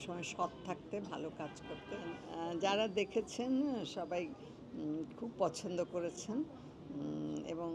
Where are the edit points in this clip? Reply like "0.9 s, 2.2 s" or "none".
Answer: 2.2 s